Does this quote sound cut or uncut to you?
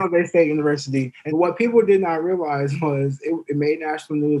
cut